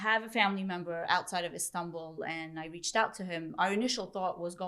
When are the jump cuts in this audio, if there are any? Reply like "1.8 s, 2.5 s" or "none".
none